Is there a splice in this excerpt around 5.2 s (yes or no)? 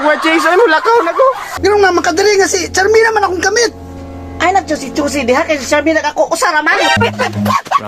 no